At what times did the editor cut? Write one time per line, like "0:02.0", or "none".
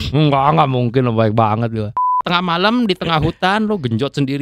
0:02.2